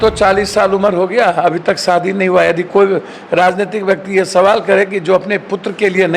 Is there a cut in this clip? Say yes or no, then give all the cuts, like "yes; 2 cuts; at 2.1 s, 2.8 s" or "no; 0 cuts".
no; 0 cuts